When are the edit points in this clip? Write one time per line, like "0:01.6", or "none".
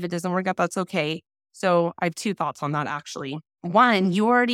0:03.5